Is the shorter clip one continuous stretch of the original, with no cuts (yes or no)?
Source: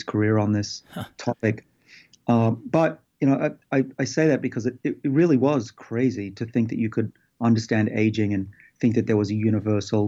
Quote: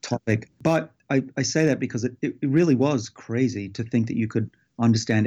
no